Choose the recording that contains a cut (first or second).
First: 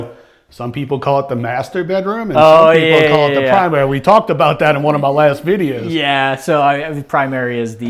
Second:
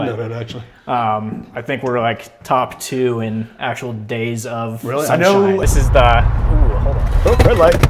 second